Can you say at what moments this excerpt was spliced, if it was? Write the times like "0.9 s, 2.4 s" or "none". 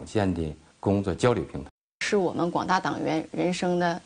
none